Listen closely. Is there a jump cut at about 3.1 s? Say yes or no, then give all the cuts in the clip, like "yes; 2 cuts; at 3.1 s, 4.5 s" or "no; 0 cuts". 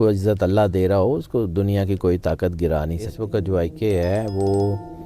yes; 1 cut; at 3.1 s